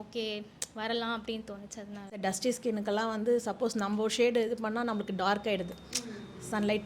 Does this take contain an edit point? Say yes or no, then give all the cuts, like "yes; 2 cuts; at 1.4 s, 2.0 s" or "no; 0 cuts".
yes; 1 cut; at 2.2 s